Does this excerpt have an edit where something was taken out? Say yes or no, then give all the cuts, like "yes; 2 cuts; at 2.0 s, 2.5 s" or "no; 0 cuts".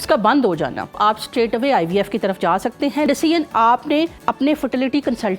yes; 3 cuts; at 1.0 s, 3.1 s, 4.2 s